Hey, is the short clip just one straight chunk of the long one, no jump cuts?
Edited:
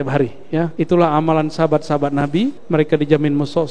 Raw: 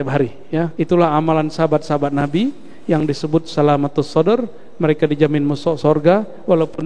no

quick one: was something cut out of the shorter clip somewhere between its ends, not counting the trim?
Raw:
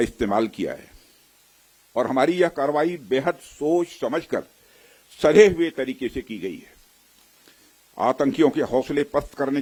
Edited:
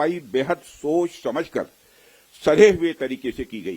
no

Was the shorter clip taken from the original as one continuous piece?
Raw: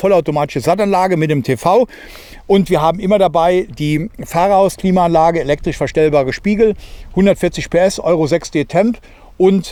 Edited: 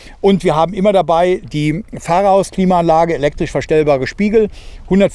yes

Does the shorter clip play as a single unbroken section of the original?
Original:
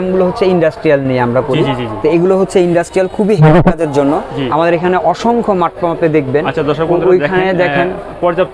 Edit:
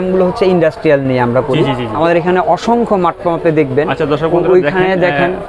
no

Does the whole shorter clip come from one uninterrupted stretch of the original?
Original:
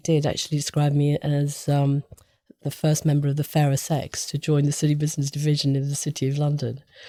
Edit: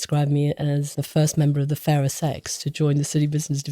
no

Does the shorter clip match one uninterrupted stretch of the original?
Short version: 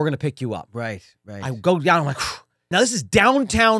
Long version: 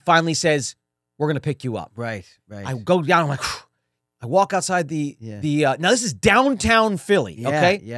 no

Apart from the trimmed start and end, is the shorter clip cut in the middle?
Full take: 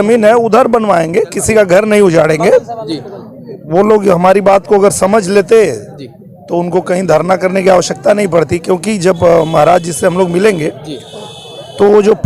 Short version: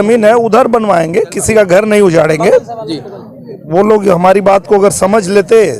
no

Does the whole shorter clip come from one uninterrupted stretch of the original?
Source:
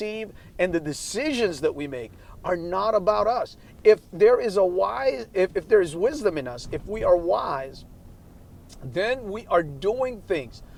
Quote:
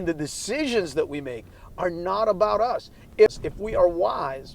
no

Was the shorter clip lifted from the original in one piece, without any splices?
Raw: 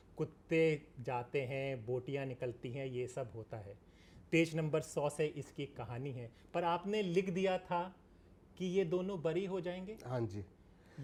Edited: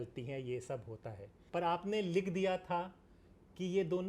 no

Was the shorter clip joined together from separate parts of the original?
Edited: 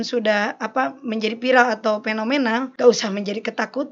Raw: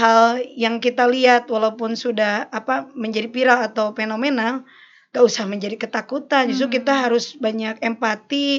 yes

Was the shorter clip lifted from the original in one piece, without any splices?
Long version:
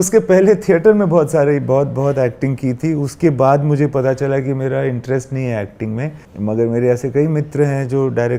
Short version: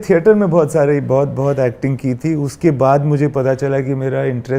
yes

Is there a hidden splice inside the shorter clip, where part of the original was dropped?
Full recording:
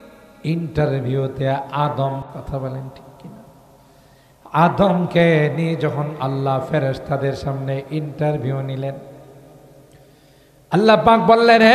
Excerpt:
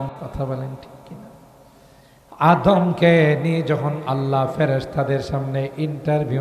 no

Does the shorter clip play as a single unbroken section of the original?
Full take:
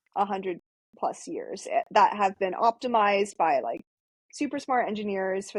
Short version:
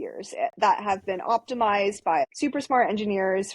no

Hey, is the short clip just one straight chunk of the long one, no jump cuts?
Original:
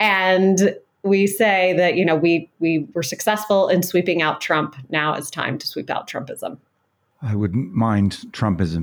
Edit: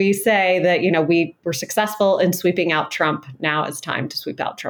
no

